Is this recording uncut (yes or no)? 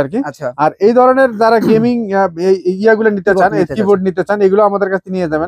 yes